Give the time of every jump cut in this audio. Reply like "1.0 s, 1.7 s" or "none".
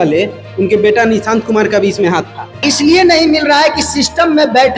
2.7 s